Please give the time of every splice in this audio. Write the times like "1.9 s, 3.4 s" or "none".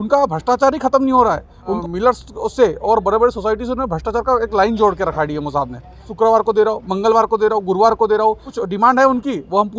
1.8 s, 6.0 s, 8.5 s